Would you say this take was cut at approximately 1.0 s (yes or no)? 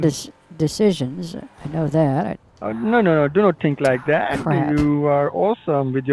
no